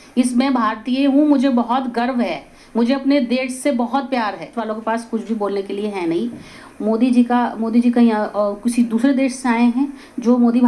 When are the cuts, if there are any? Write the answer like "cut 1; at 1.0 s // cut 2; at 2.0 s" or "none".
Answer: cut 1; at 4.5 s